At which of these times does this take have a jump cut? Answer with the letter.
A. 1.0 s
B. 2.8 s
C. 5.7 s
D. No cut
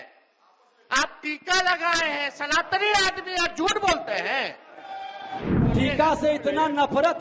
C